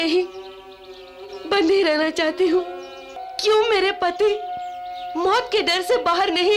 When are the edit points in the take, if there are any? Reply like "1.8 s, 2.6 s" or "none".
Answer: 3.2 s